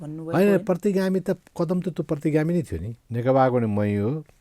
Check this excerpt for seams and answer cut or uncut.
cut